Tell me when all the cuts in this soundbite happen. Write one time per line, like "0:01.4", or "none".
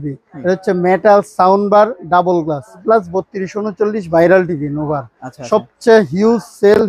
0:02.8